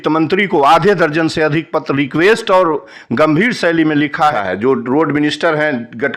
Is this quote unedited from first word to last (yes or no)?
no